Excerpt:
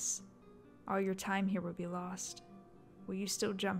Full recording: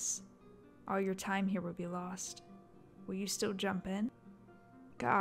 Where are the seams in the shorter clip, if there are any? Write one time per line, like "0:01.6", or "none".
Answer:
none

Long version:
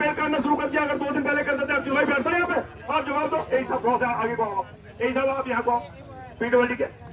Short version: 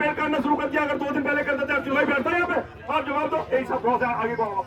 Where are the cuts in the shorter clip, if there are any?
none

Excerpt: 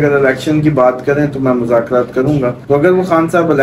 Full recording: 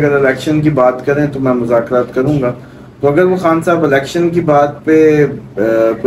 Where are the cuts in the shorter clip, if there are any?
0:02.6

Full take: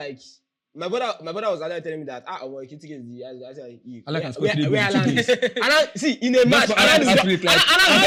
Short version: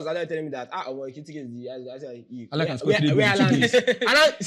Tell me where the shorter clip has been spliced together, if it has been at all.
none

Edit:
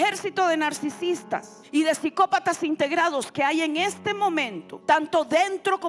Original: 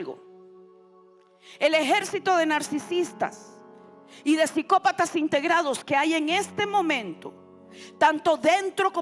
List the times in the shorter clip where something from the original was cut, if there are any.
0:01.6
0:04.6

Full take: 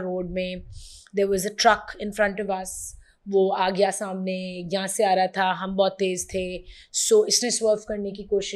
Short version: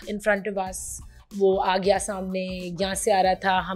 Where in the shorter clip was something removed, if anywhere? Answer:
none

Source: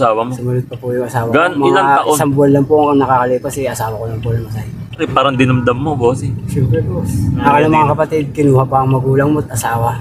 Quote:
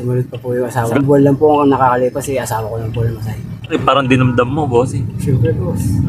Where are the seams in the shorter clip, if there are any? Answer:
0:01.0

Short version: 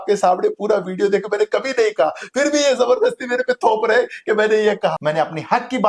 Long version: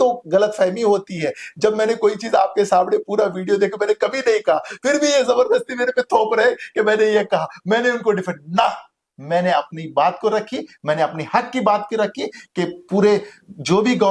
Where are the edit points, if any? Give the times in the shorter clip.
0:05.0

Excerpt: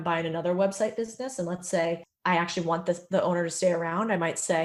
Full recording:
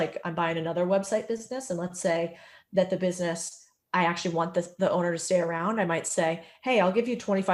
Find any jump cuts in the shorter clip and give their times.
0:02.1

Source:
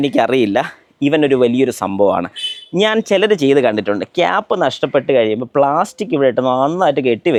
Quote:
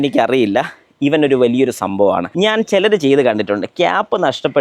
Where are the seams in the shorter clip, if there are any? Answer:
0:02.3

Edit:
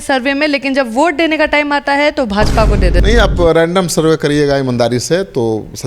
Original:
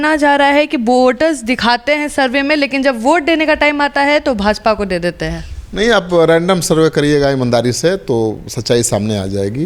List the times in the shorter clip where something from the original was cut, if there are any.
0:03.0

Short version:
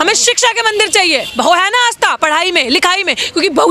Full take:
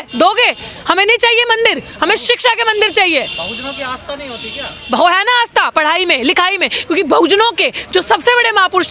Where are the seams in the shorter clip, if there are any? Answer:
0:01.3

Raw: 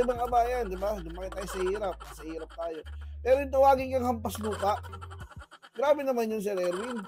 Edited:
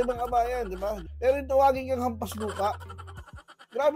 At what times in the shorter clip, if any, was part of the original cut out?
0:01.1

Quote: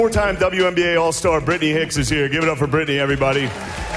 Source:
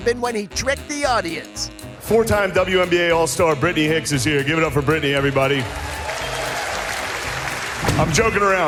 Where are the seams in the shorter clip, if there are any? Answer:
none

